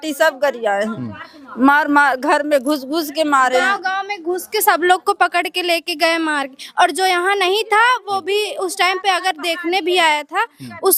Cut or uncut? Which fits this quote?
uncut